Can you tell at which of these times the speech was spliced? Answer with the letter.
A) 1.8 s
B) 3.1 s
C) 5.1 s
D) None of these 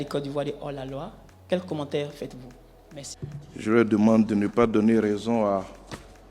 B